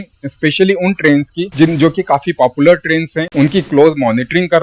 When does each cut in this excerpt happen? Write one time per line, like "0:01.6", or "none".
0:01.4
0:03.2